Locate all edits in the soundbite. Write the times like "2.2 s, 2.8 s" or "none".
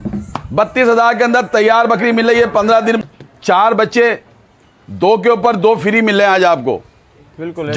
3.0 s